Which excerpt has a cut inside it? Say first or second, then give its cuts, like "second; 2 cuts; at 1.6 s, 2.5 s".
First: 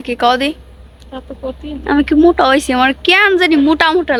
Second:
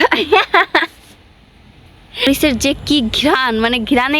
second; 1 cut; at 2.3 s